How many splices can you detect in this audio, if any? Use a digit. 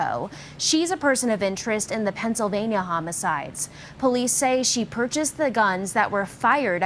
1